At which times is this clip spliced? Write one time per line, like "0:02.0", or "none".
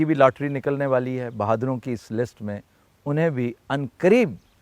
none